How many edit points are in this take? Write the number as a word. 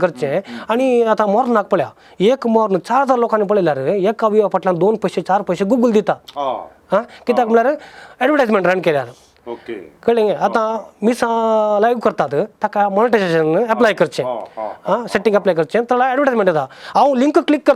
zero